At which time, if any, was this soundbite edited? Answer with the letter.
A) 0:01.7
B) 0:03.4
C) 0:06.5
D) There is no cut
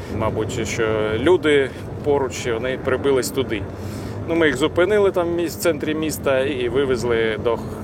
C